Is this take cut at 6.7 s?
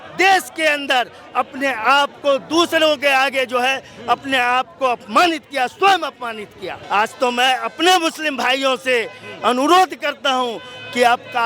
yes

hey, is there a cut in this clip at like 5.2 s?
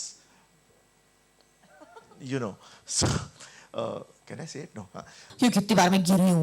yes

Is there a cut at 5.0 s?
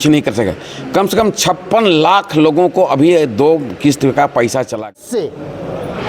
yes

